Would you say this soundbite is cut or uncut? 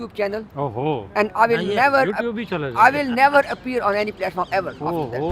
uncut